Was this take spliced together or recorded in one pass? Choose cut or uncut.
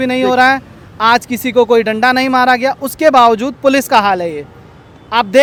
uncut